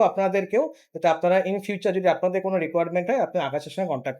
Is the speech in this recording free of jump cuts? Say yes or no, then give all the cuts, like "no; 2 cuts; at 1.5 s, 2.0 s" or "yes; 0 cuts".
yes; 0 cuts